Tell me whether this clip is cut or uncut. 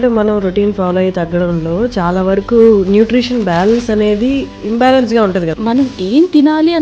cut